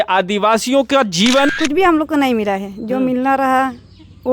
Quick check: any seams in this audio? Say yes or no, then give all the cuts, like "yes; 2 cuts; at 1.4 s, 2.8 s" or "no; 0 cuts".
yes; 1 cut; at 1.5 s